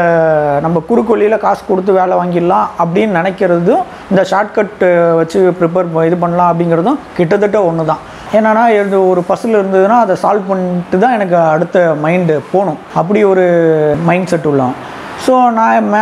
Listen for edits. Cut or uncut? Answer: cut